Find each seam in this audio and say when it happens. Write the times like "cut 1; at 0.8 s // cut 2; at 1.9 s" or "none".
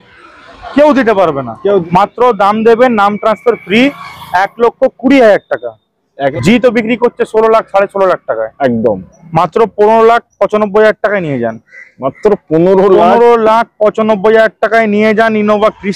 cut 1; at 1.8 s // cut 2; at 6.3 s